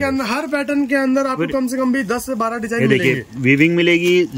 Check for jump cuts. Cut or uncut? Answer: uncut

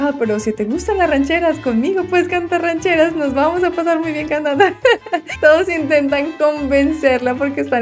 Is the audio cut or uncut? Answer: uncut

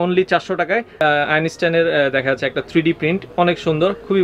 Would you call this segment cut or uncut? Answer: cut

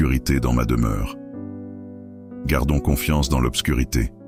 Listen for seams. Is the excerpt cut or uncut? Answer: uncut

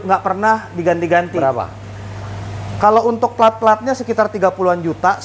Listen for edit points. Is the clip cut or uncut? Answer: uncut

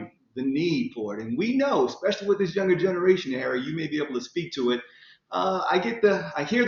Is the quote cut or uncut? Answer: uncut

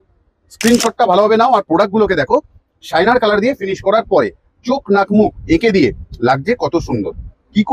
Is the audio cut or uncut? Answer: uncut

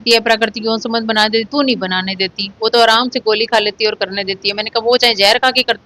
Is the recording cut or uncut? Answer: uncut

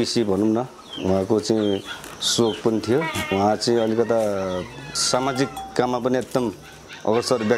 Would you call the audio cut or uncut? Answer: cut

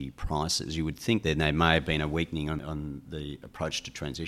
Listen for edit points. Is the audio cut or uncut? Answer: cut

